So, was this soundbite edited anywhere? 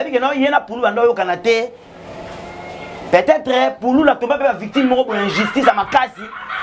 no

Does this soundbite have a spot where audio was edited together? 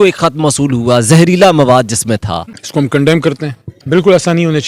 yes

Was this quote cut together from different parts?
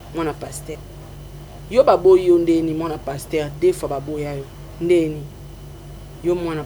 yes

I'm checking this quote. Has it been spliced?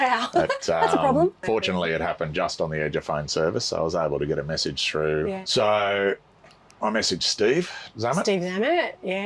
yes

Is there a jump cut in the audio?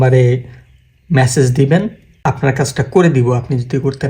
yes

